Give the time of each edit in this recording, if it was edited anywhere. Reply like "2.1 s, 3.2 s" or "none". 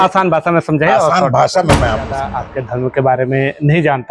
2.4 s